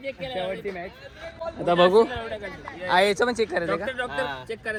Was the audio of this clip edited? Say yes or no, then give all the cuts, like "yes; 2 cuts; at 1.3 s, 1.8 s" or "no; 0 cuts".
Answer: no; 0 cuts